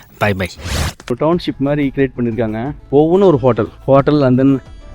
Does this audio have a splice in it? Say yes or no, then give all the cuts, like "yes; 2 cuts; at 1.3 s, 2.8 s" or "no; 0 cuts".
yes; 3 cuts; at 1.1 s, 2.8 s, 3.7 s